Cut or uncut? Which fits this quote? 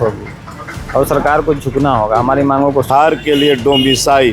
cut